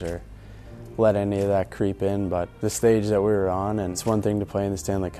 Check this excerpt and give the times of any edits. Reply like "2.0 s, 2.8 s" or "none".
2.5 s, 4.0 s